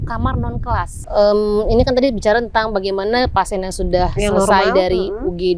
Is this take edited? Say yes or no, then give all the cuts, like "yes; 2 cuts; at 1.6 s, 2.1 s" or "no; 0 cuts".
yes; 1 cut; at 1.0 s